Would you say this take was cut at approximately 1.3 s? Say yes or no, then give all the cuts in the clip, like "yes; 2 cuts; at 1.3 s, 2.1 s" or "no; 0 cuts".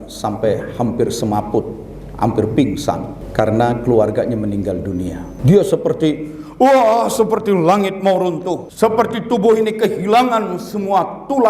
no; 3 cuts; at 3.2 s, 5.3 s, 8.7 s